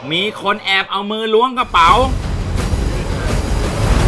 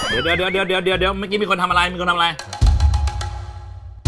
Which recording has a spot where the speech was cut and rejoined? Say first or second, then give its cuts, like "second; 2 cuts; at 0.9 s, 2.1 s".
first; 1 cut; at 2.2 s